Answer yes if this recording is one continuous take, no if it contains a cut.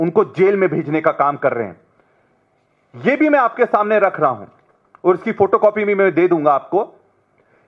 yes